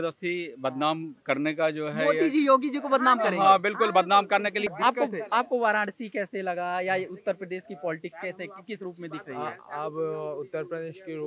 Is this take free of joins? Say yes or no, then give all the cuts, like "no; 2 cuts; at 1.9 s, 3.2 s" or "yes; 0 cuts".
no; 1 cut; at 4.7 s